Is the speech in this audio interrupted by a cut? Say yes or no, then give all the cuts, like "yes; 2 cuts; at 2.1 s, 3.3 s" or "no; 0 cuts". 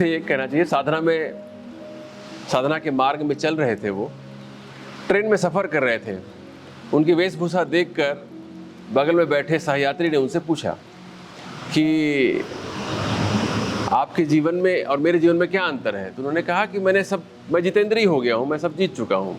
no; 0 cuts